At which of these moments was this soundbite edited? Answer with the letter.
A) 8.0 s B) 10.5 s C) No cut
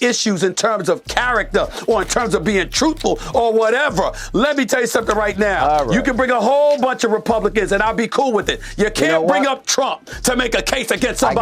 C